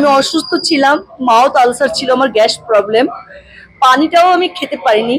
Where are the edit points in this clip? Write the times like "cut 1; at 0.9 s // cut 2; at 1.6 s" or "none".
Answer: none

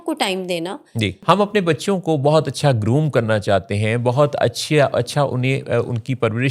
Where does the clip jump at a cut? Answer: cut 1; at 1.2 s

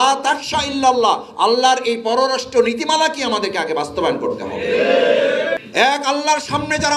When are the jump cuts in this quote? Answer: cut 1; at 5.7 s

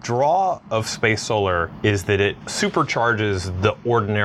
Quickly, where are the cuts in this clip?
none

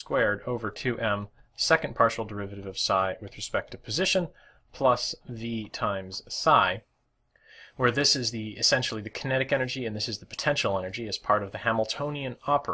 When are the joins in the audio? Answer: cut 1; at 9.3 s

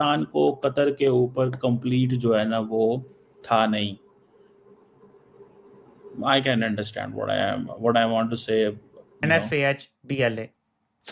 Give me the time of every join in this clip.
cut 1; at 9.2 s

